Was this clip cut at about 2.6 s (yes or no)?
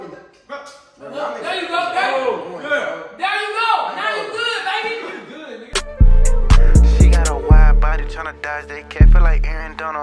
no